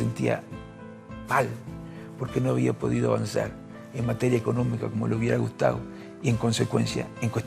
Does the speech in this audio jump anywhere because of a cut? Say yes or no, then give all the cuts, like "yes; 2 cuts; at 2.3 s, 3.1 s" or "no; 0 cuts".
no; 0 cuts